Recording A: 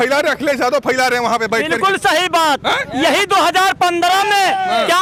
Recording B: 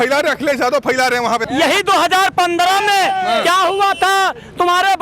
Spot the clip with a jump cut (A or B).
B